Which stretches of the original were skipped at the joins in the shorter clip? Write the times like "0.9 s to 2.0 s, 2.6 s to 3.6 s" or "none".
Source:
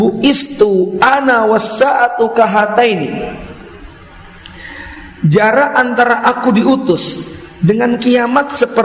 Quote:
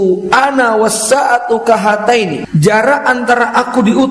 3.1 s to 5.1 s